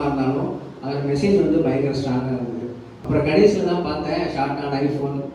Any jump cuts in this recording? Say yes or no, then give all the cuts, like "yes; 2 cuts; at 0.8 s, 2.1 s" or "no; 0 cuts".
yes; 1 cut; at 2.9 s